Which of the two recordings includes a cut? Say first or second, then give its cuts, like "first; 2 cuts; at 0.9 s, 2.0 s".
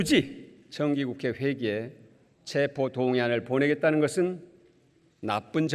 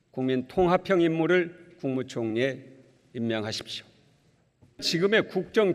second; 1 cut; at 4.9 s